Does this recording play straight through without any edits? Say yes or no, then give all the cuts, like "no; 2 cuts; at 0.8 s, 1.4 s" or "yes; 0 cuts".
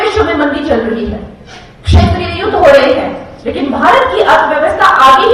yes; 0 cuts